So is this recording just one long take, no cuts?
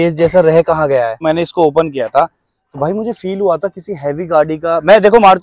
no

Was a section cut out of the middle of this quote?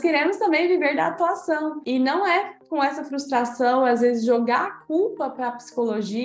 no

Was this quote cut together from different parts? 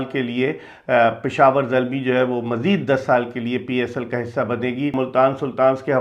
yes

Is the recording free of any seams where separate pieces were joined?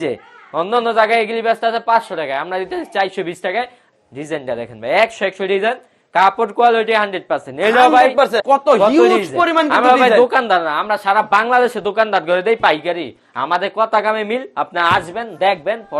no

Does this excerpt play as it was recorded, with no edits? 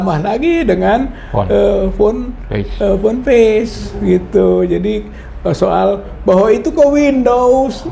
yes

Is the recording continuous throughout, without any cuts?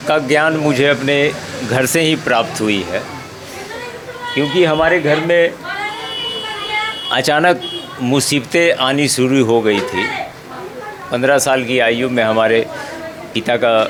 yes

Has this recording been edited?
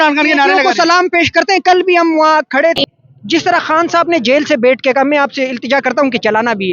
yes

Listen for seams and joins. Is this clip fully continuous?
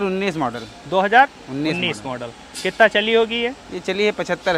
yes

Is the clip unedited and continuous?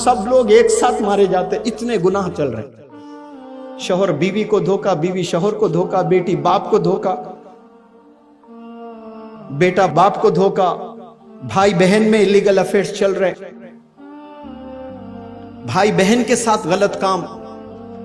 yes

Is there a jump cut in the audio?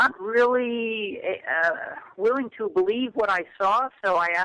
yes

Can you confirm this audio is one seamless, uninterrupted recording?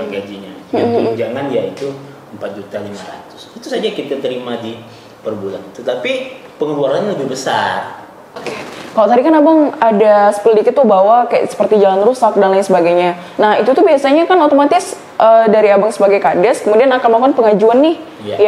no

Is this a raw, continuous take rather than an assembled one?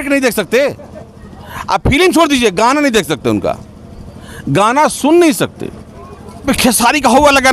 no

